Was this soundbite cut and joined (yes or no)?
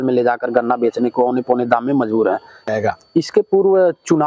yes